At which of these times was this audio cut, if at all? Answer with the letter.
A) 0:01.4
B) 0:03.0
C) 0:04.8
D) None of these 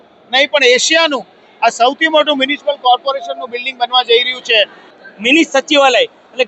C